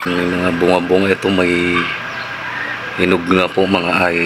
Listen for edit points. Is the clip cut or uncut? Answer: uncut